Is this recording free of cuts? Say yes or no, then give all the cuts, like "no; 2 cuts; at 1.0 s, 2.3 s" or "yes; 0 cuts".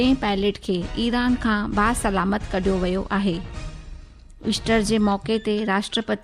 yes; 0 cuts